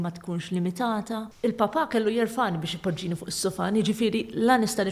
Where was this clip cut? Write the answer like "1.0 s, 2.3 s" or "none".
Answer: 1.3 s